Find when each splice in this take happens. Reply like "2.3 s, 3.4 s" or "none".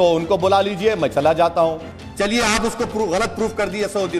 1.9 s